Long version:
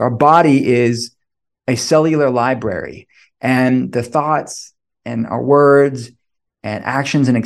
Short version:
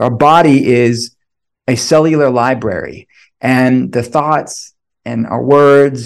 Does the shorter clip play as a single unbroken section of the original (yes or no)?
yes